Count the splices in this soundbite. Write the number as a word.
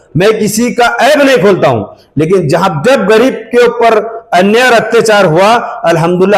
zero